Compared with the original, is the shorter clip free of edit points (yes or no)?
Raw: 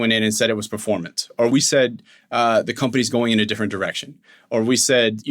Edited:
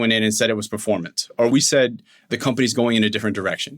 no